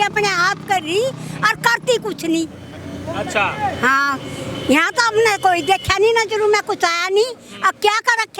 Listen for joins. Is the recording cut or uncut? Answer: uncut